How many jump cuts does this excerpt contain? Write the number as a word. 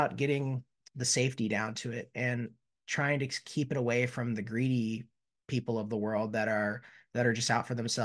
zero